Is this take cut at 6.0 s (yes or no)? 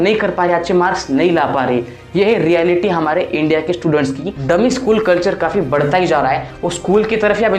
no